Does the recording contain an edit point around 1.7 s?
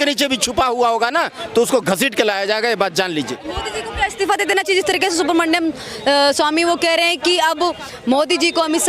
no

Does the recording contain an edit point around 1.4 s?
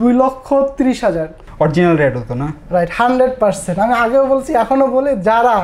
yes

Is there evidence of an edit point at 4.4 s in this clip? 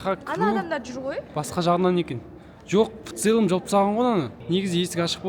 yes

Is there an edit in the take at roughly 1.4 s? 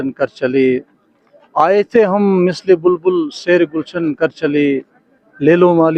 no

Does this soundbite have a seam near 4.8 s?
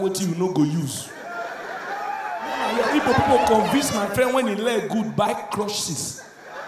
no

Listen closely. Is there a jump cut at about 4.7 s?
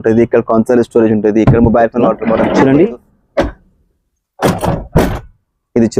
no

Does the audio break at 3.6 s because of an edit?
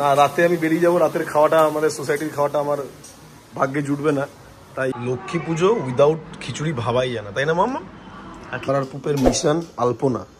no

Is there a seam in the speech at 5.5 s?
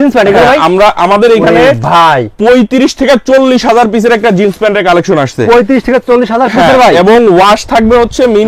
no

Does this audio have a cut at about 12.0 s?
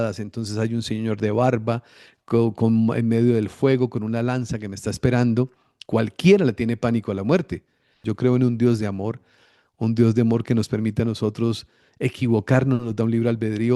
no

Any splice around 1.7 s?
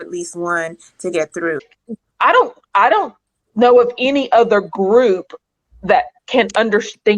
yes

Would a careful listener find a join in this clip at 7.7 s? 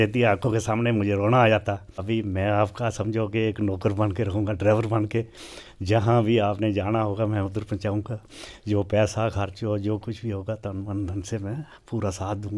no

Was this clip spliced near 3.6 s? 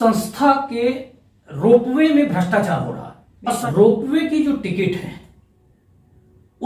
yes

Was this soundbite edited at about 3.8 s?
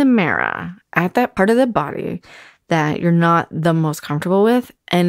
no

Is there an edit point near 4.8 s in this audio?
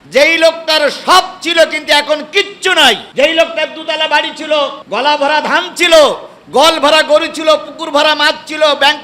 yes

